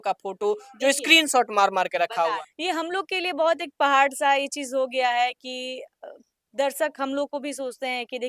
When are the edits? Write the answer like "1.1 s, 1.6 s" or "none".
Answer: 2.5 s